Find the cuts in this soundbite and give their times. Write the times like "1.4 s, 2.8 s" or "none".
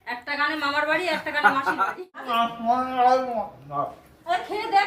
2.3 s